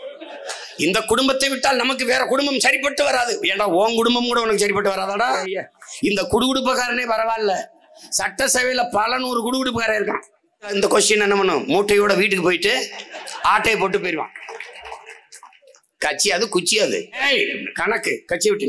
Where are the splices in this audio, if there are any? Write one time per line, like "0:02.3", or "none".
0:05.4
0:10.7
0:17.2